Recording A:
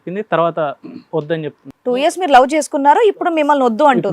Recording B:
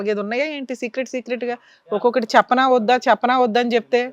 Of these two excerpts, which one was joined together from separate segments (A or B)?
A